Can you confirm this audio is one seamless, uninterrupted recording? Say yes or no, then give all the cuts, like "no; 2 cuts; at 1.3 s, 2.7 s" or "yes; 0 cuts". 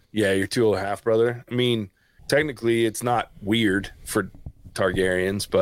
no; 1 cut; at 2.1 s